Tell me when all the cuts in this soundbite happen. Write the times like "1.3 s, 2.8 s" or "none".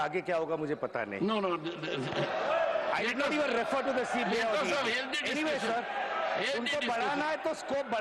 none